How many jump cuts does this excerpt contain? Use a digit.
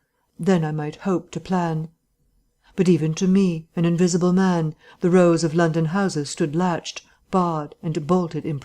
1